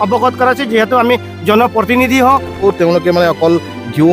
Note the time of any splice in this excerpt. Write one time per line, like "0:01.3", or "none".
0:02.6